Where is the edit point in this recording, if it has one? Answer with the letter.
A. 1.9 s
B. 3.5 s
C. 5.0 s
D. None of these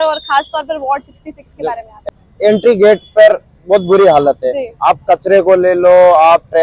A